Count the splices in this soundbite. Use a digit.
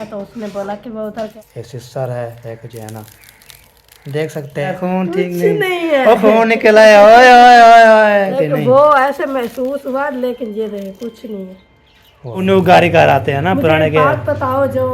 4